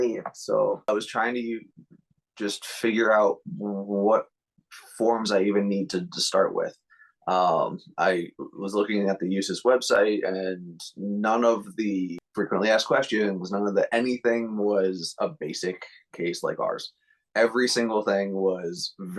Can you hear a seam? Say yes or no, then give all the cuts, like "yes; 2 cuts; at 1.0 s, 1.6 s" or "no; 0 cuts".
yes; 2 cuts; at 0.9 s, 12.2 s